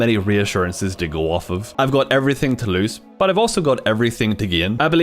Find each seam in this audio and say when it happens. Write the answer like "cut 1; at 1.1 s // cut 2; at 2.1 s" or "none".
cut 1; at 1.7 s